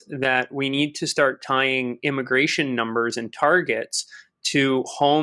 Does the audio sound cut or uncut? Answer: uncut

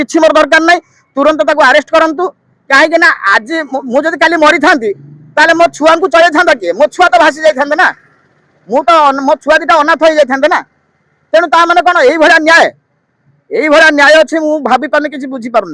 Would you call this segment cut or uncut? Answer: uncut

